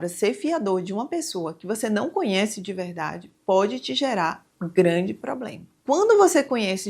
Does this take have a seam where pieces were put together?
no; 0 cuts

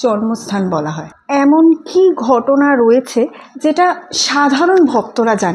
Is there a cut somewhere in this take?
yes; 1 cut; at 1.1 s

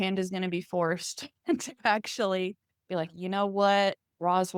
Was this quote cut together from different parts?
no; 0 cuts

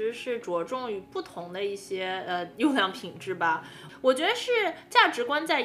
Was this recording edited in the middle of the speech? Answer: yes; 2 cuts; at 2.5 s, 3.8 s

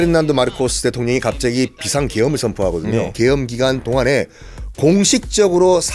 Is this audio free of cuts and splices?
no; 1 cut; at 3.1 s

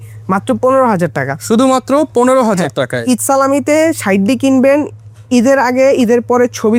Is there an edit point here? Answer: no; 0 cuts

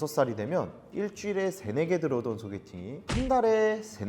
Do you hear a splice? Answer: yes; 1 cut; at 3.0 s

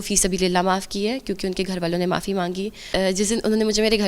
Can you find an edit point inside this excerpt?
yes; 1 cut; at 2.8 s

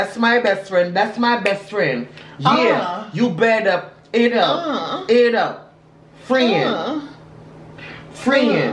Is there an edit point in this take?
no; 0 cuts

